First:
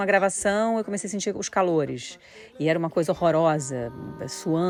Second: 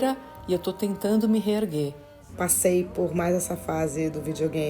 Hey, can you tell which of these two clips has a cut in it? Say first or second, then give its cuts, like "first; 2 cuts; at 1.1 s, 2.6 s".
second; 1 cut; at 2.0 s